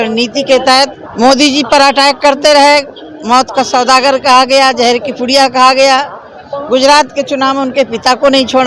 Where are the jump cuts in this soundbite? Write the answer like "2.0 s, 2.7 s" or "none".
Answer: 1.0 s

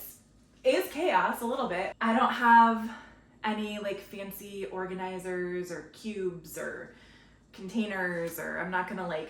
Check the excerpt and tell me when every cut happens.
1.9 s

